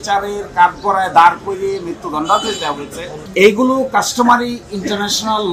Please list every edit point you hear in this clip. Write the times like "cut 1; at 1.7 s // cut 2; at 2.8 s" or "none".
cut 1; at 3.2 s